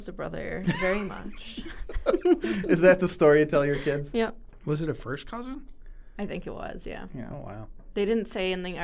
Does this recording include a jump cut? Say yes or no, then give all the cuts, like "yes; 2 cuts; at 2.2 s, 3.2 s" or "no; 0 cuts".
no; 0 cuts